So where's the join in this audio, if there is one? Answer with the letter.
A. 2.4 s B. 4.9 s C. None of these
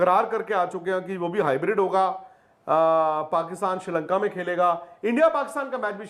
C